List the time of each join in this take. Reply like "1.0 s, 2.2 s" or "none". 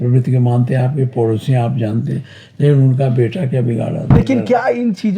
4.2 s